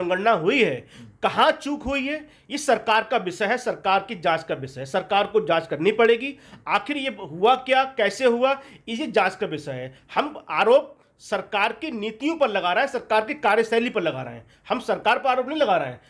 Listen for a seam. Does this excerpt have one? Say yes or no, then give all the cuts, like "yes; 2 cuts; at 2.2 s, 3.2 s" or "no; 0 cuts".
no; 0 cuts